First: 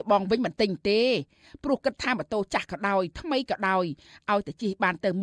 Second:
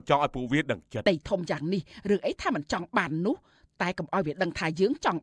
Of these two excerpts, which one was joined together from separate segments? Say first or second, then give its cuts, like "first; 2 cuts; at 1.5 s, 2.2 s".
second; 1 cut; at 1.0 s